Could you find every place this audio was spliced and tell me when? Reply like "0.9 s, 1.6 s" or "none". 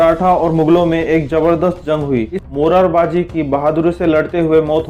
2.3 s